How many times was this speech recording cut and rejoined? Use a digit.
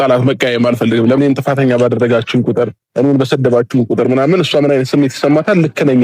1